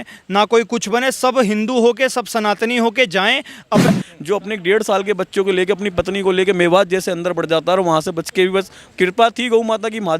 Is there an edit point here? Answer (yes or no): yes